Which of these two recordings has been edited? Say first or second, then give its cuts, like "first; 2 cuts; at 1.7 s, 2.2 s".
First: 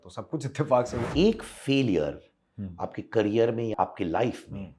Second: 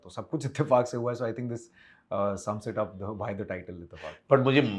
first; 2 cuts; at 1.0 s, 3.7 s